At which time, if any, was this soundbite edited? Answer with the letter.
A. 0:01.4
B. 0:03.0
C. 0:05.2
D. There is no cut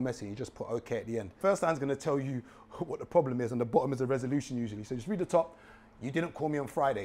A